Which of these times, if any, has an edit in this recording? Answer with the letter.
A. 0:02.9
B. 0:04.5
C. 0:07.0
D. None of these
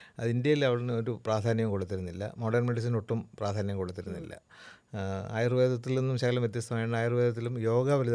D